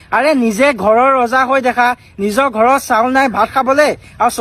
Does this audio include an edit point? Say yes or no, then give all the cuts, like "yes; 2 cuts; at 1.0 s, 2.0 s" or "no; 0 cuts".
no; 0 cuts